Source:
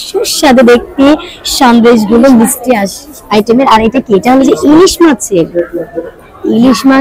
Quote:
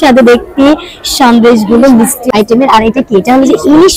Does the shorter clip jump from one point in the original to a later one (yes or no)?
yes